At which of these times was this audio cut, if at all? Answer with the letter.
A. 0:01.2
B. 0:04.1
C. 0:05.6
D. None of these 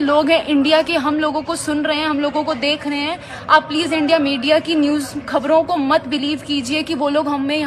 D